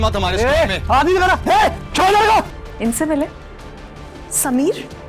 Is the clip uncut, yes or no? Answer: no